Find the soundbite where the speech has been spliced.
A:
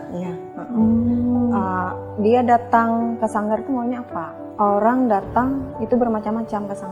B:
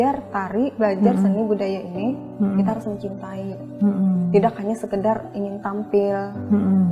A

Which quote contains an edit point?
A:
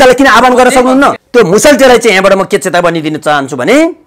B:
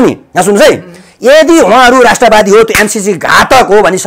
A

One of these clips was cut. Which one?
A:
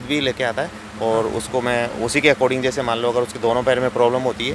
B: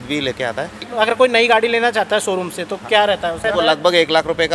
B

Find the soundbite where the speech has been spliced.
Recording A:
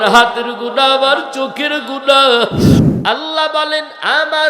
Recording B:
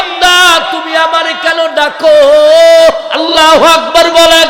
A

